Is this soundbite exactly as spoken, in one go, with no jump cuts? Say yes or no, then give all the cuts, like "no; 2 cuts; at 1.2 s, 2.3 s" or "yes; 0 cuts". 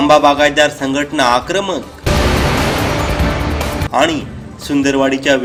yes; 0 cuts